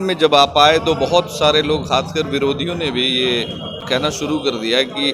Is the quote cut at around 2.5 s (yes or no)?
no